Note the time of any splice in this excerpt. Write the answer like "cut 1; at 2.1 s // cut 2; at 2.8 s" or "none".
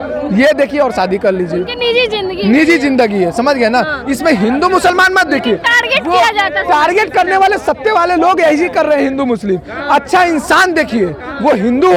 none

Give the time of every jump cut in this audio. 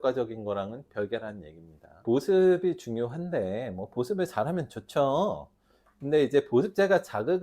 cut 1; at 2.0 s

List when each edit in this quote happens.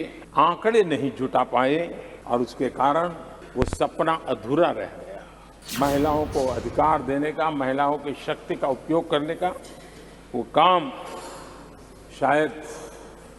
none

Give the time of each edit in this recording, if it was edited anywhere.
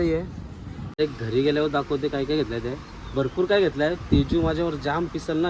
cut 1; at 1.0 s

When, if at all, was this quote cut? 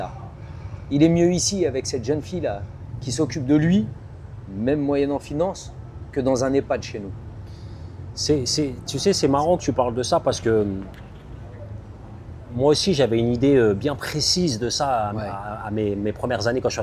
none

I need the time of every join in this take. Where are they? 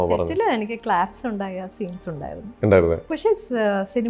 cut 1; at 3.1 s

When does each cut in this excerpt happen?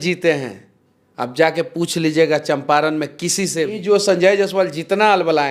cut 1; at 3.8 s

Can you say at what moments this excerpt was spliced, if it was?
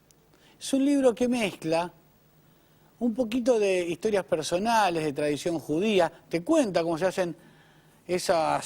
cut 1; at 4.9 s

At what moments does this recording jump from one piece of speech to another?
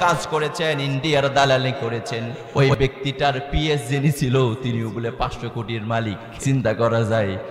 cut 1; at 2.3 s // cut 2; at 6.3 s

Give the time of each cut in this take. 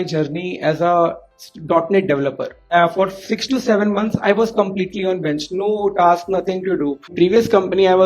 cut 1; at 2.6 s // cut 2; at 7.0 s

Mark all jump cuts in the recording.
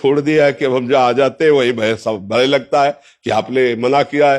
none

